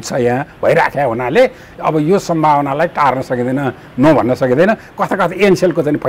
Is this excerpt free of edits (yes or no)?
yes